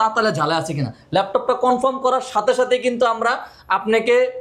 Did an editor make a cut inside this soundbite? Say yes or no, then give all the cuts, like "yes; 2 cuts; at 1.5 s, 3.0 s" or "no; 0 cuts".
no; 0 cuts